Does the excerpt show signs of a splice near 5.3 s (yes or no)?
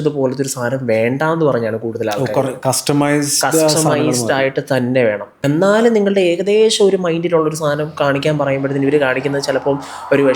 yes